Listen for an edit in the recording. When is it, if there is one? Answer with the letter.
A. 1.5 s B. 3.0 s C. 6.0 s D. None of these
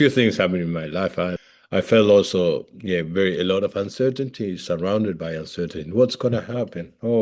A